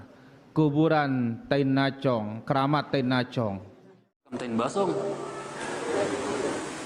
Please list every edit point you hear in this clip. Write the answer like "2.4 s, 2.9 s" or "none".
4.4 s